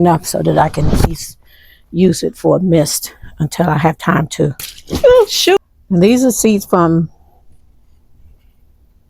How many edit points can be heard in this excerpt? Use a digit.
1